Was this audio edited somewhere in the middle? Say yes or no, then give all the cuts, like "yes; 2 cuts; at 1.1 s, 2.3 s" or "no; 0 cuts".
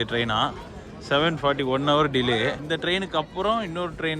yes; 1 cut; at 2.6 s